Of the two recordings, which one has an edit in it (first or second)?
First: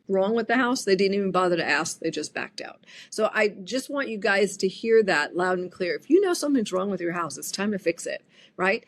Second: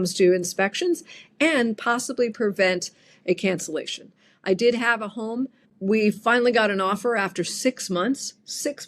second